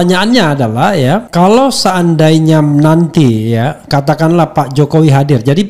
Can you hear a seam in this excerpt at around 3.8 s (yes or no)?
no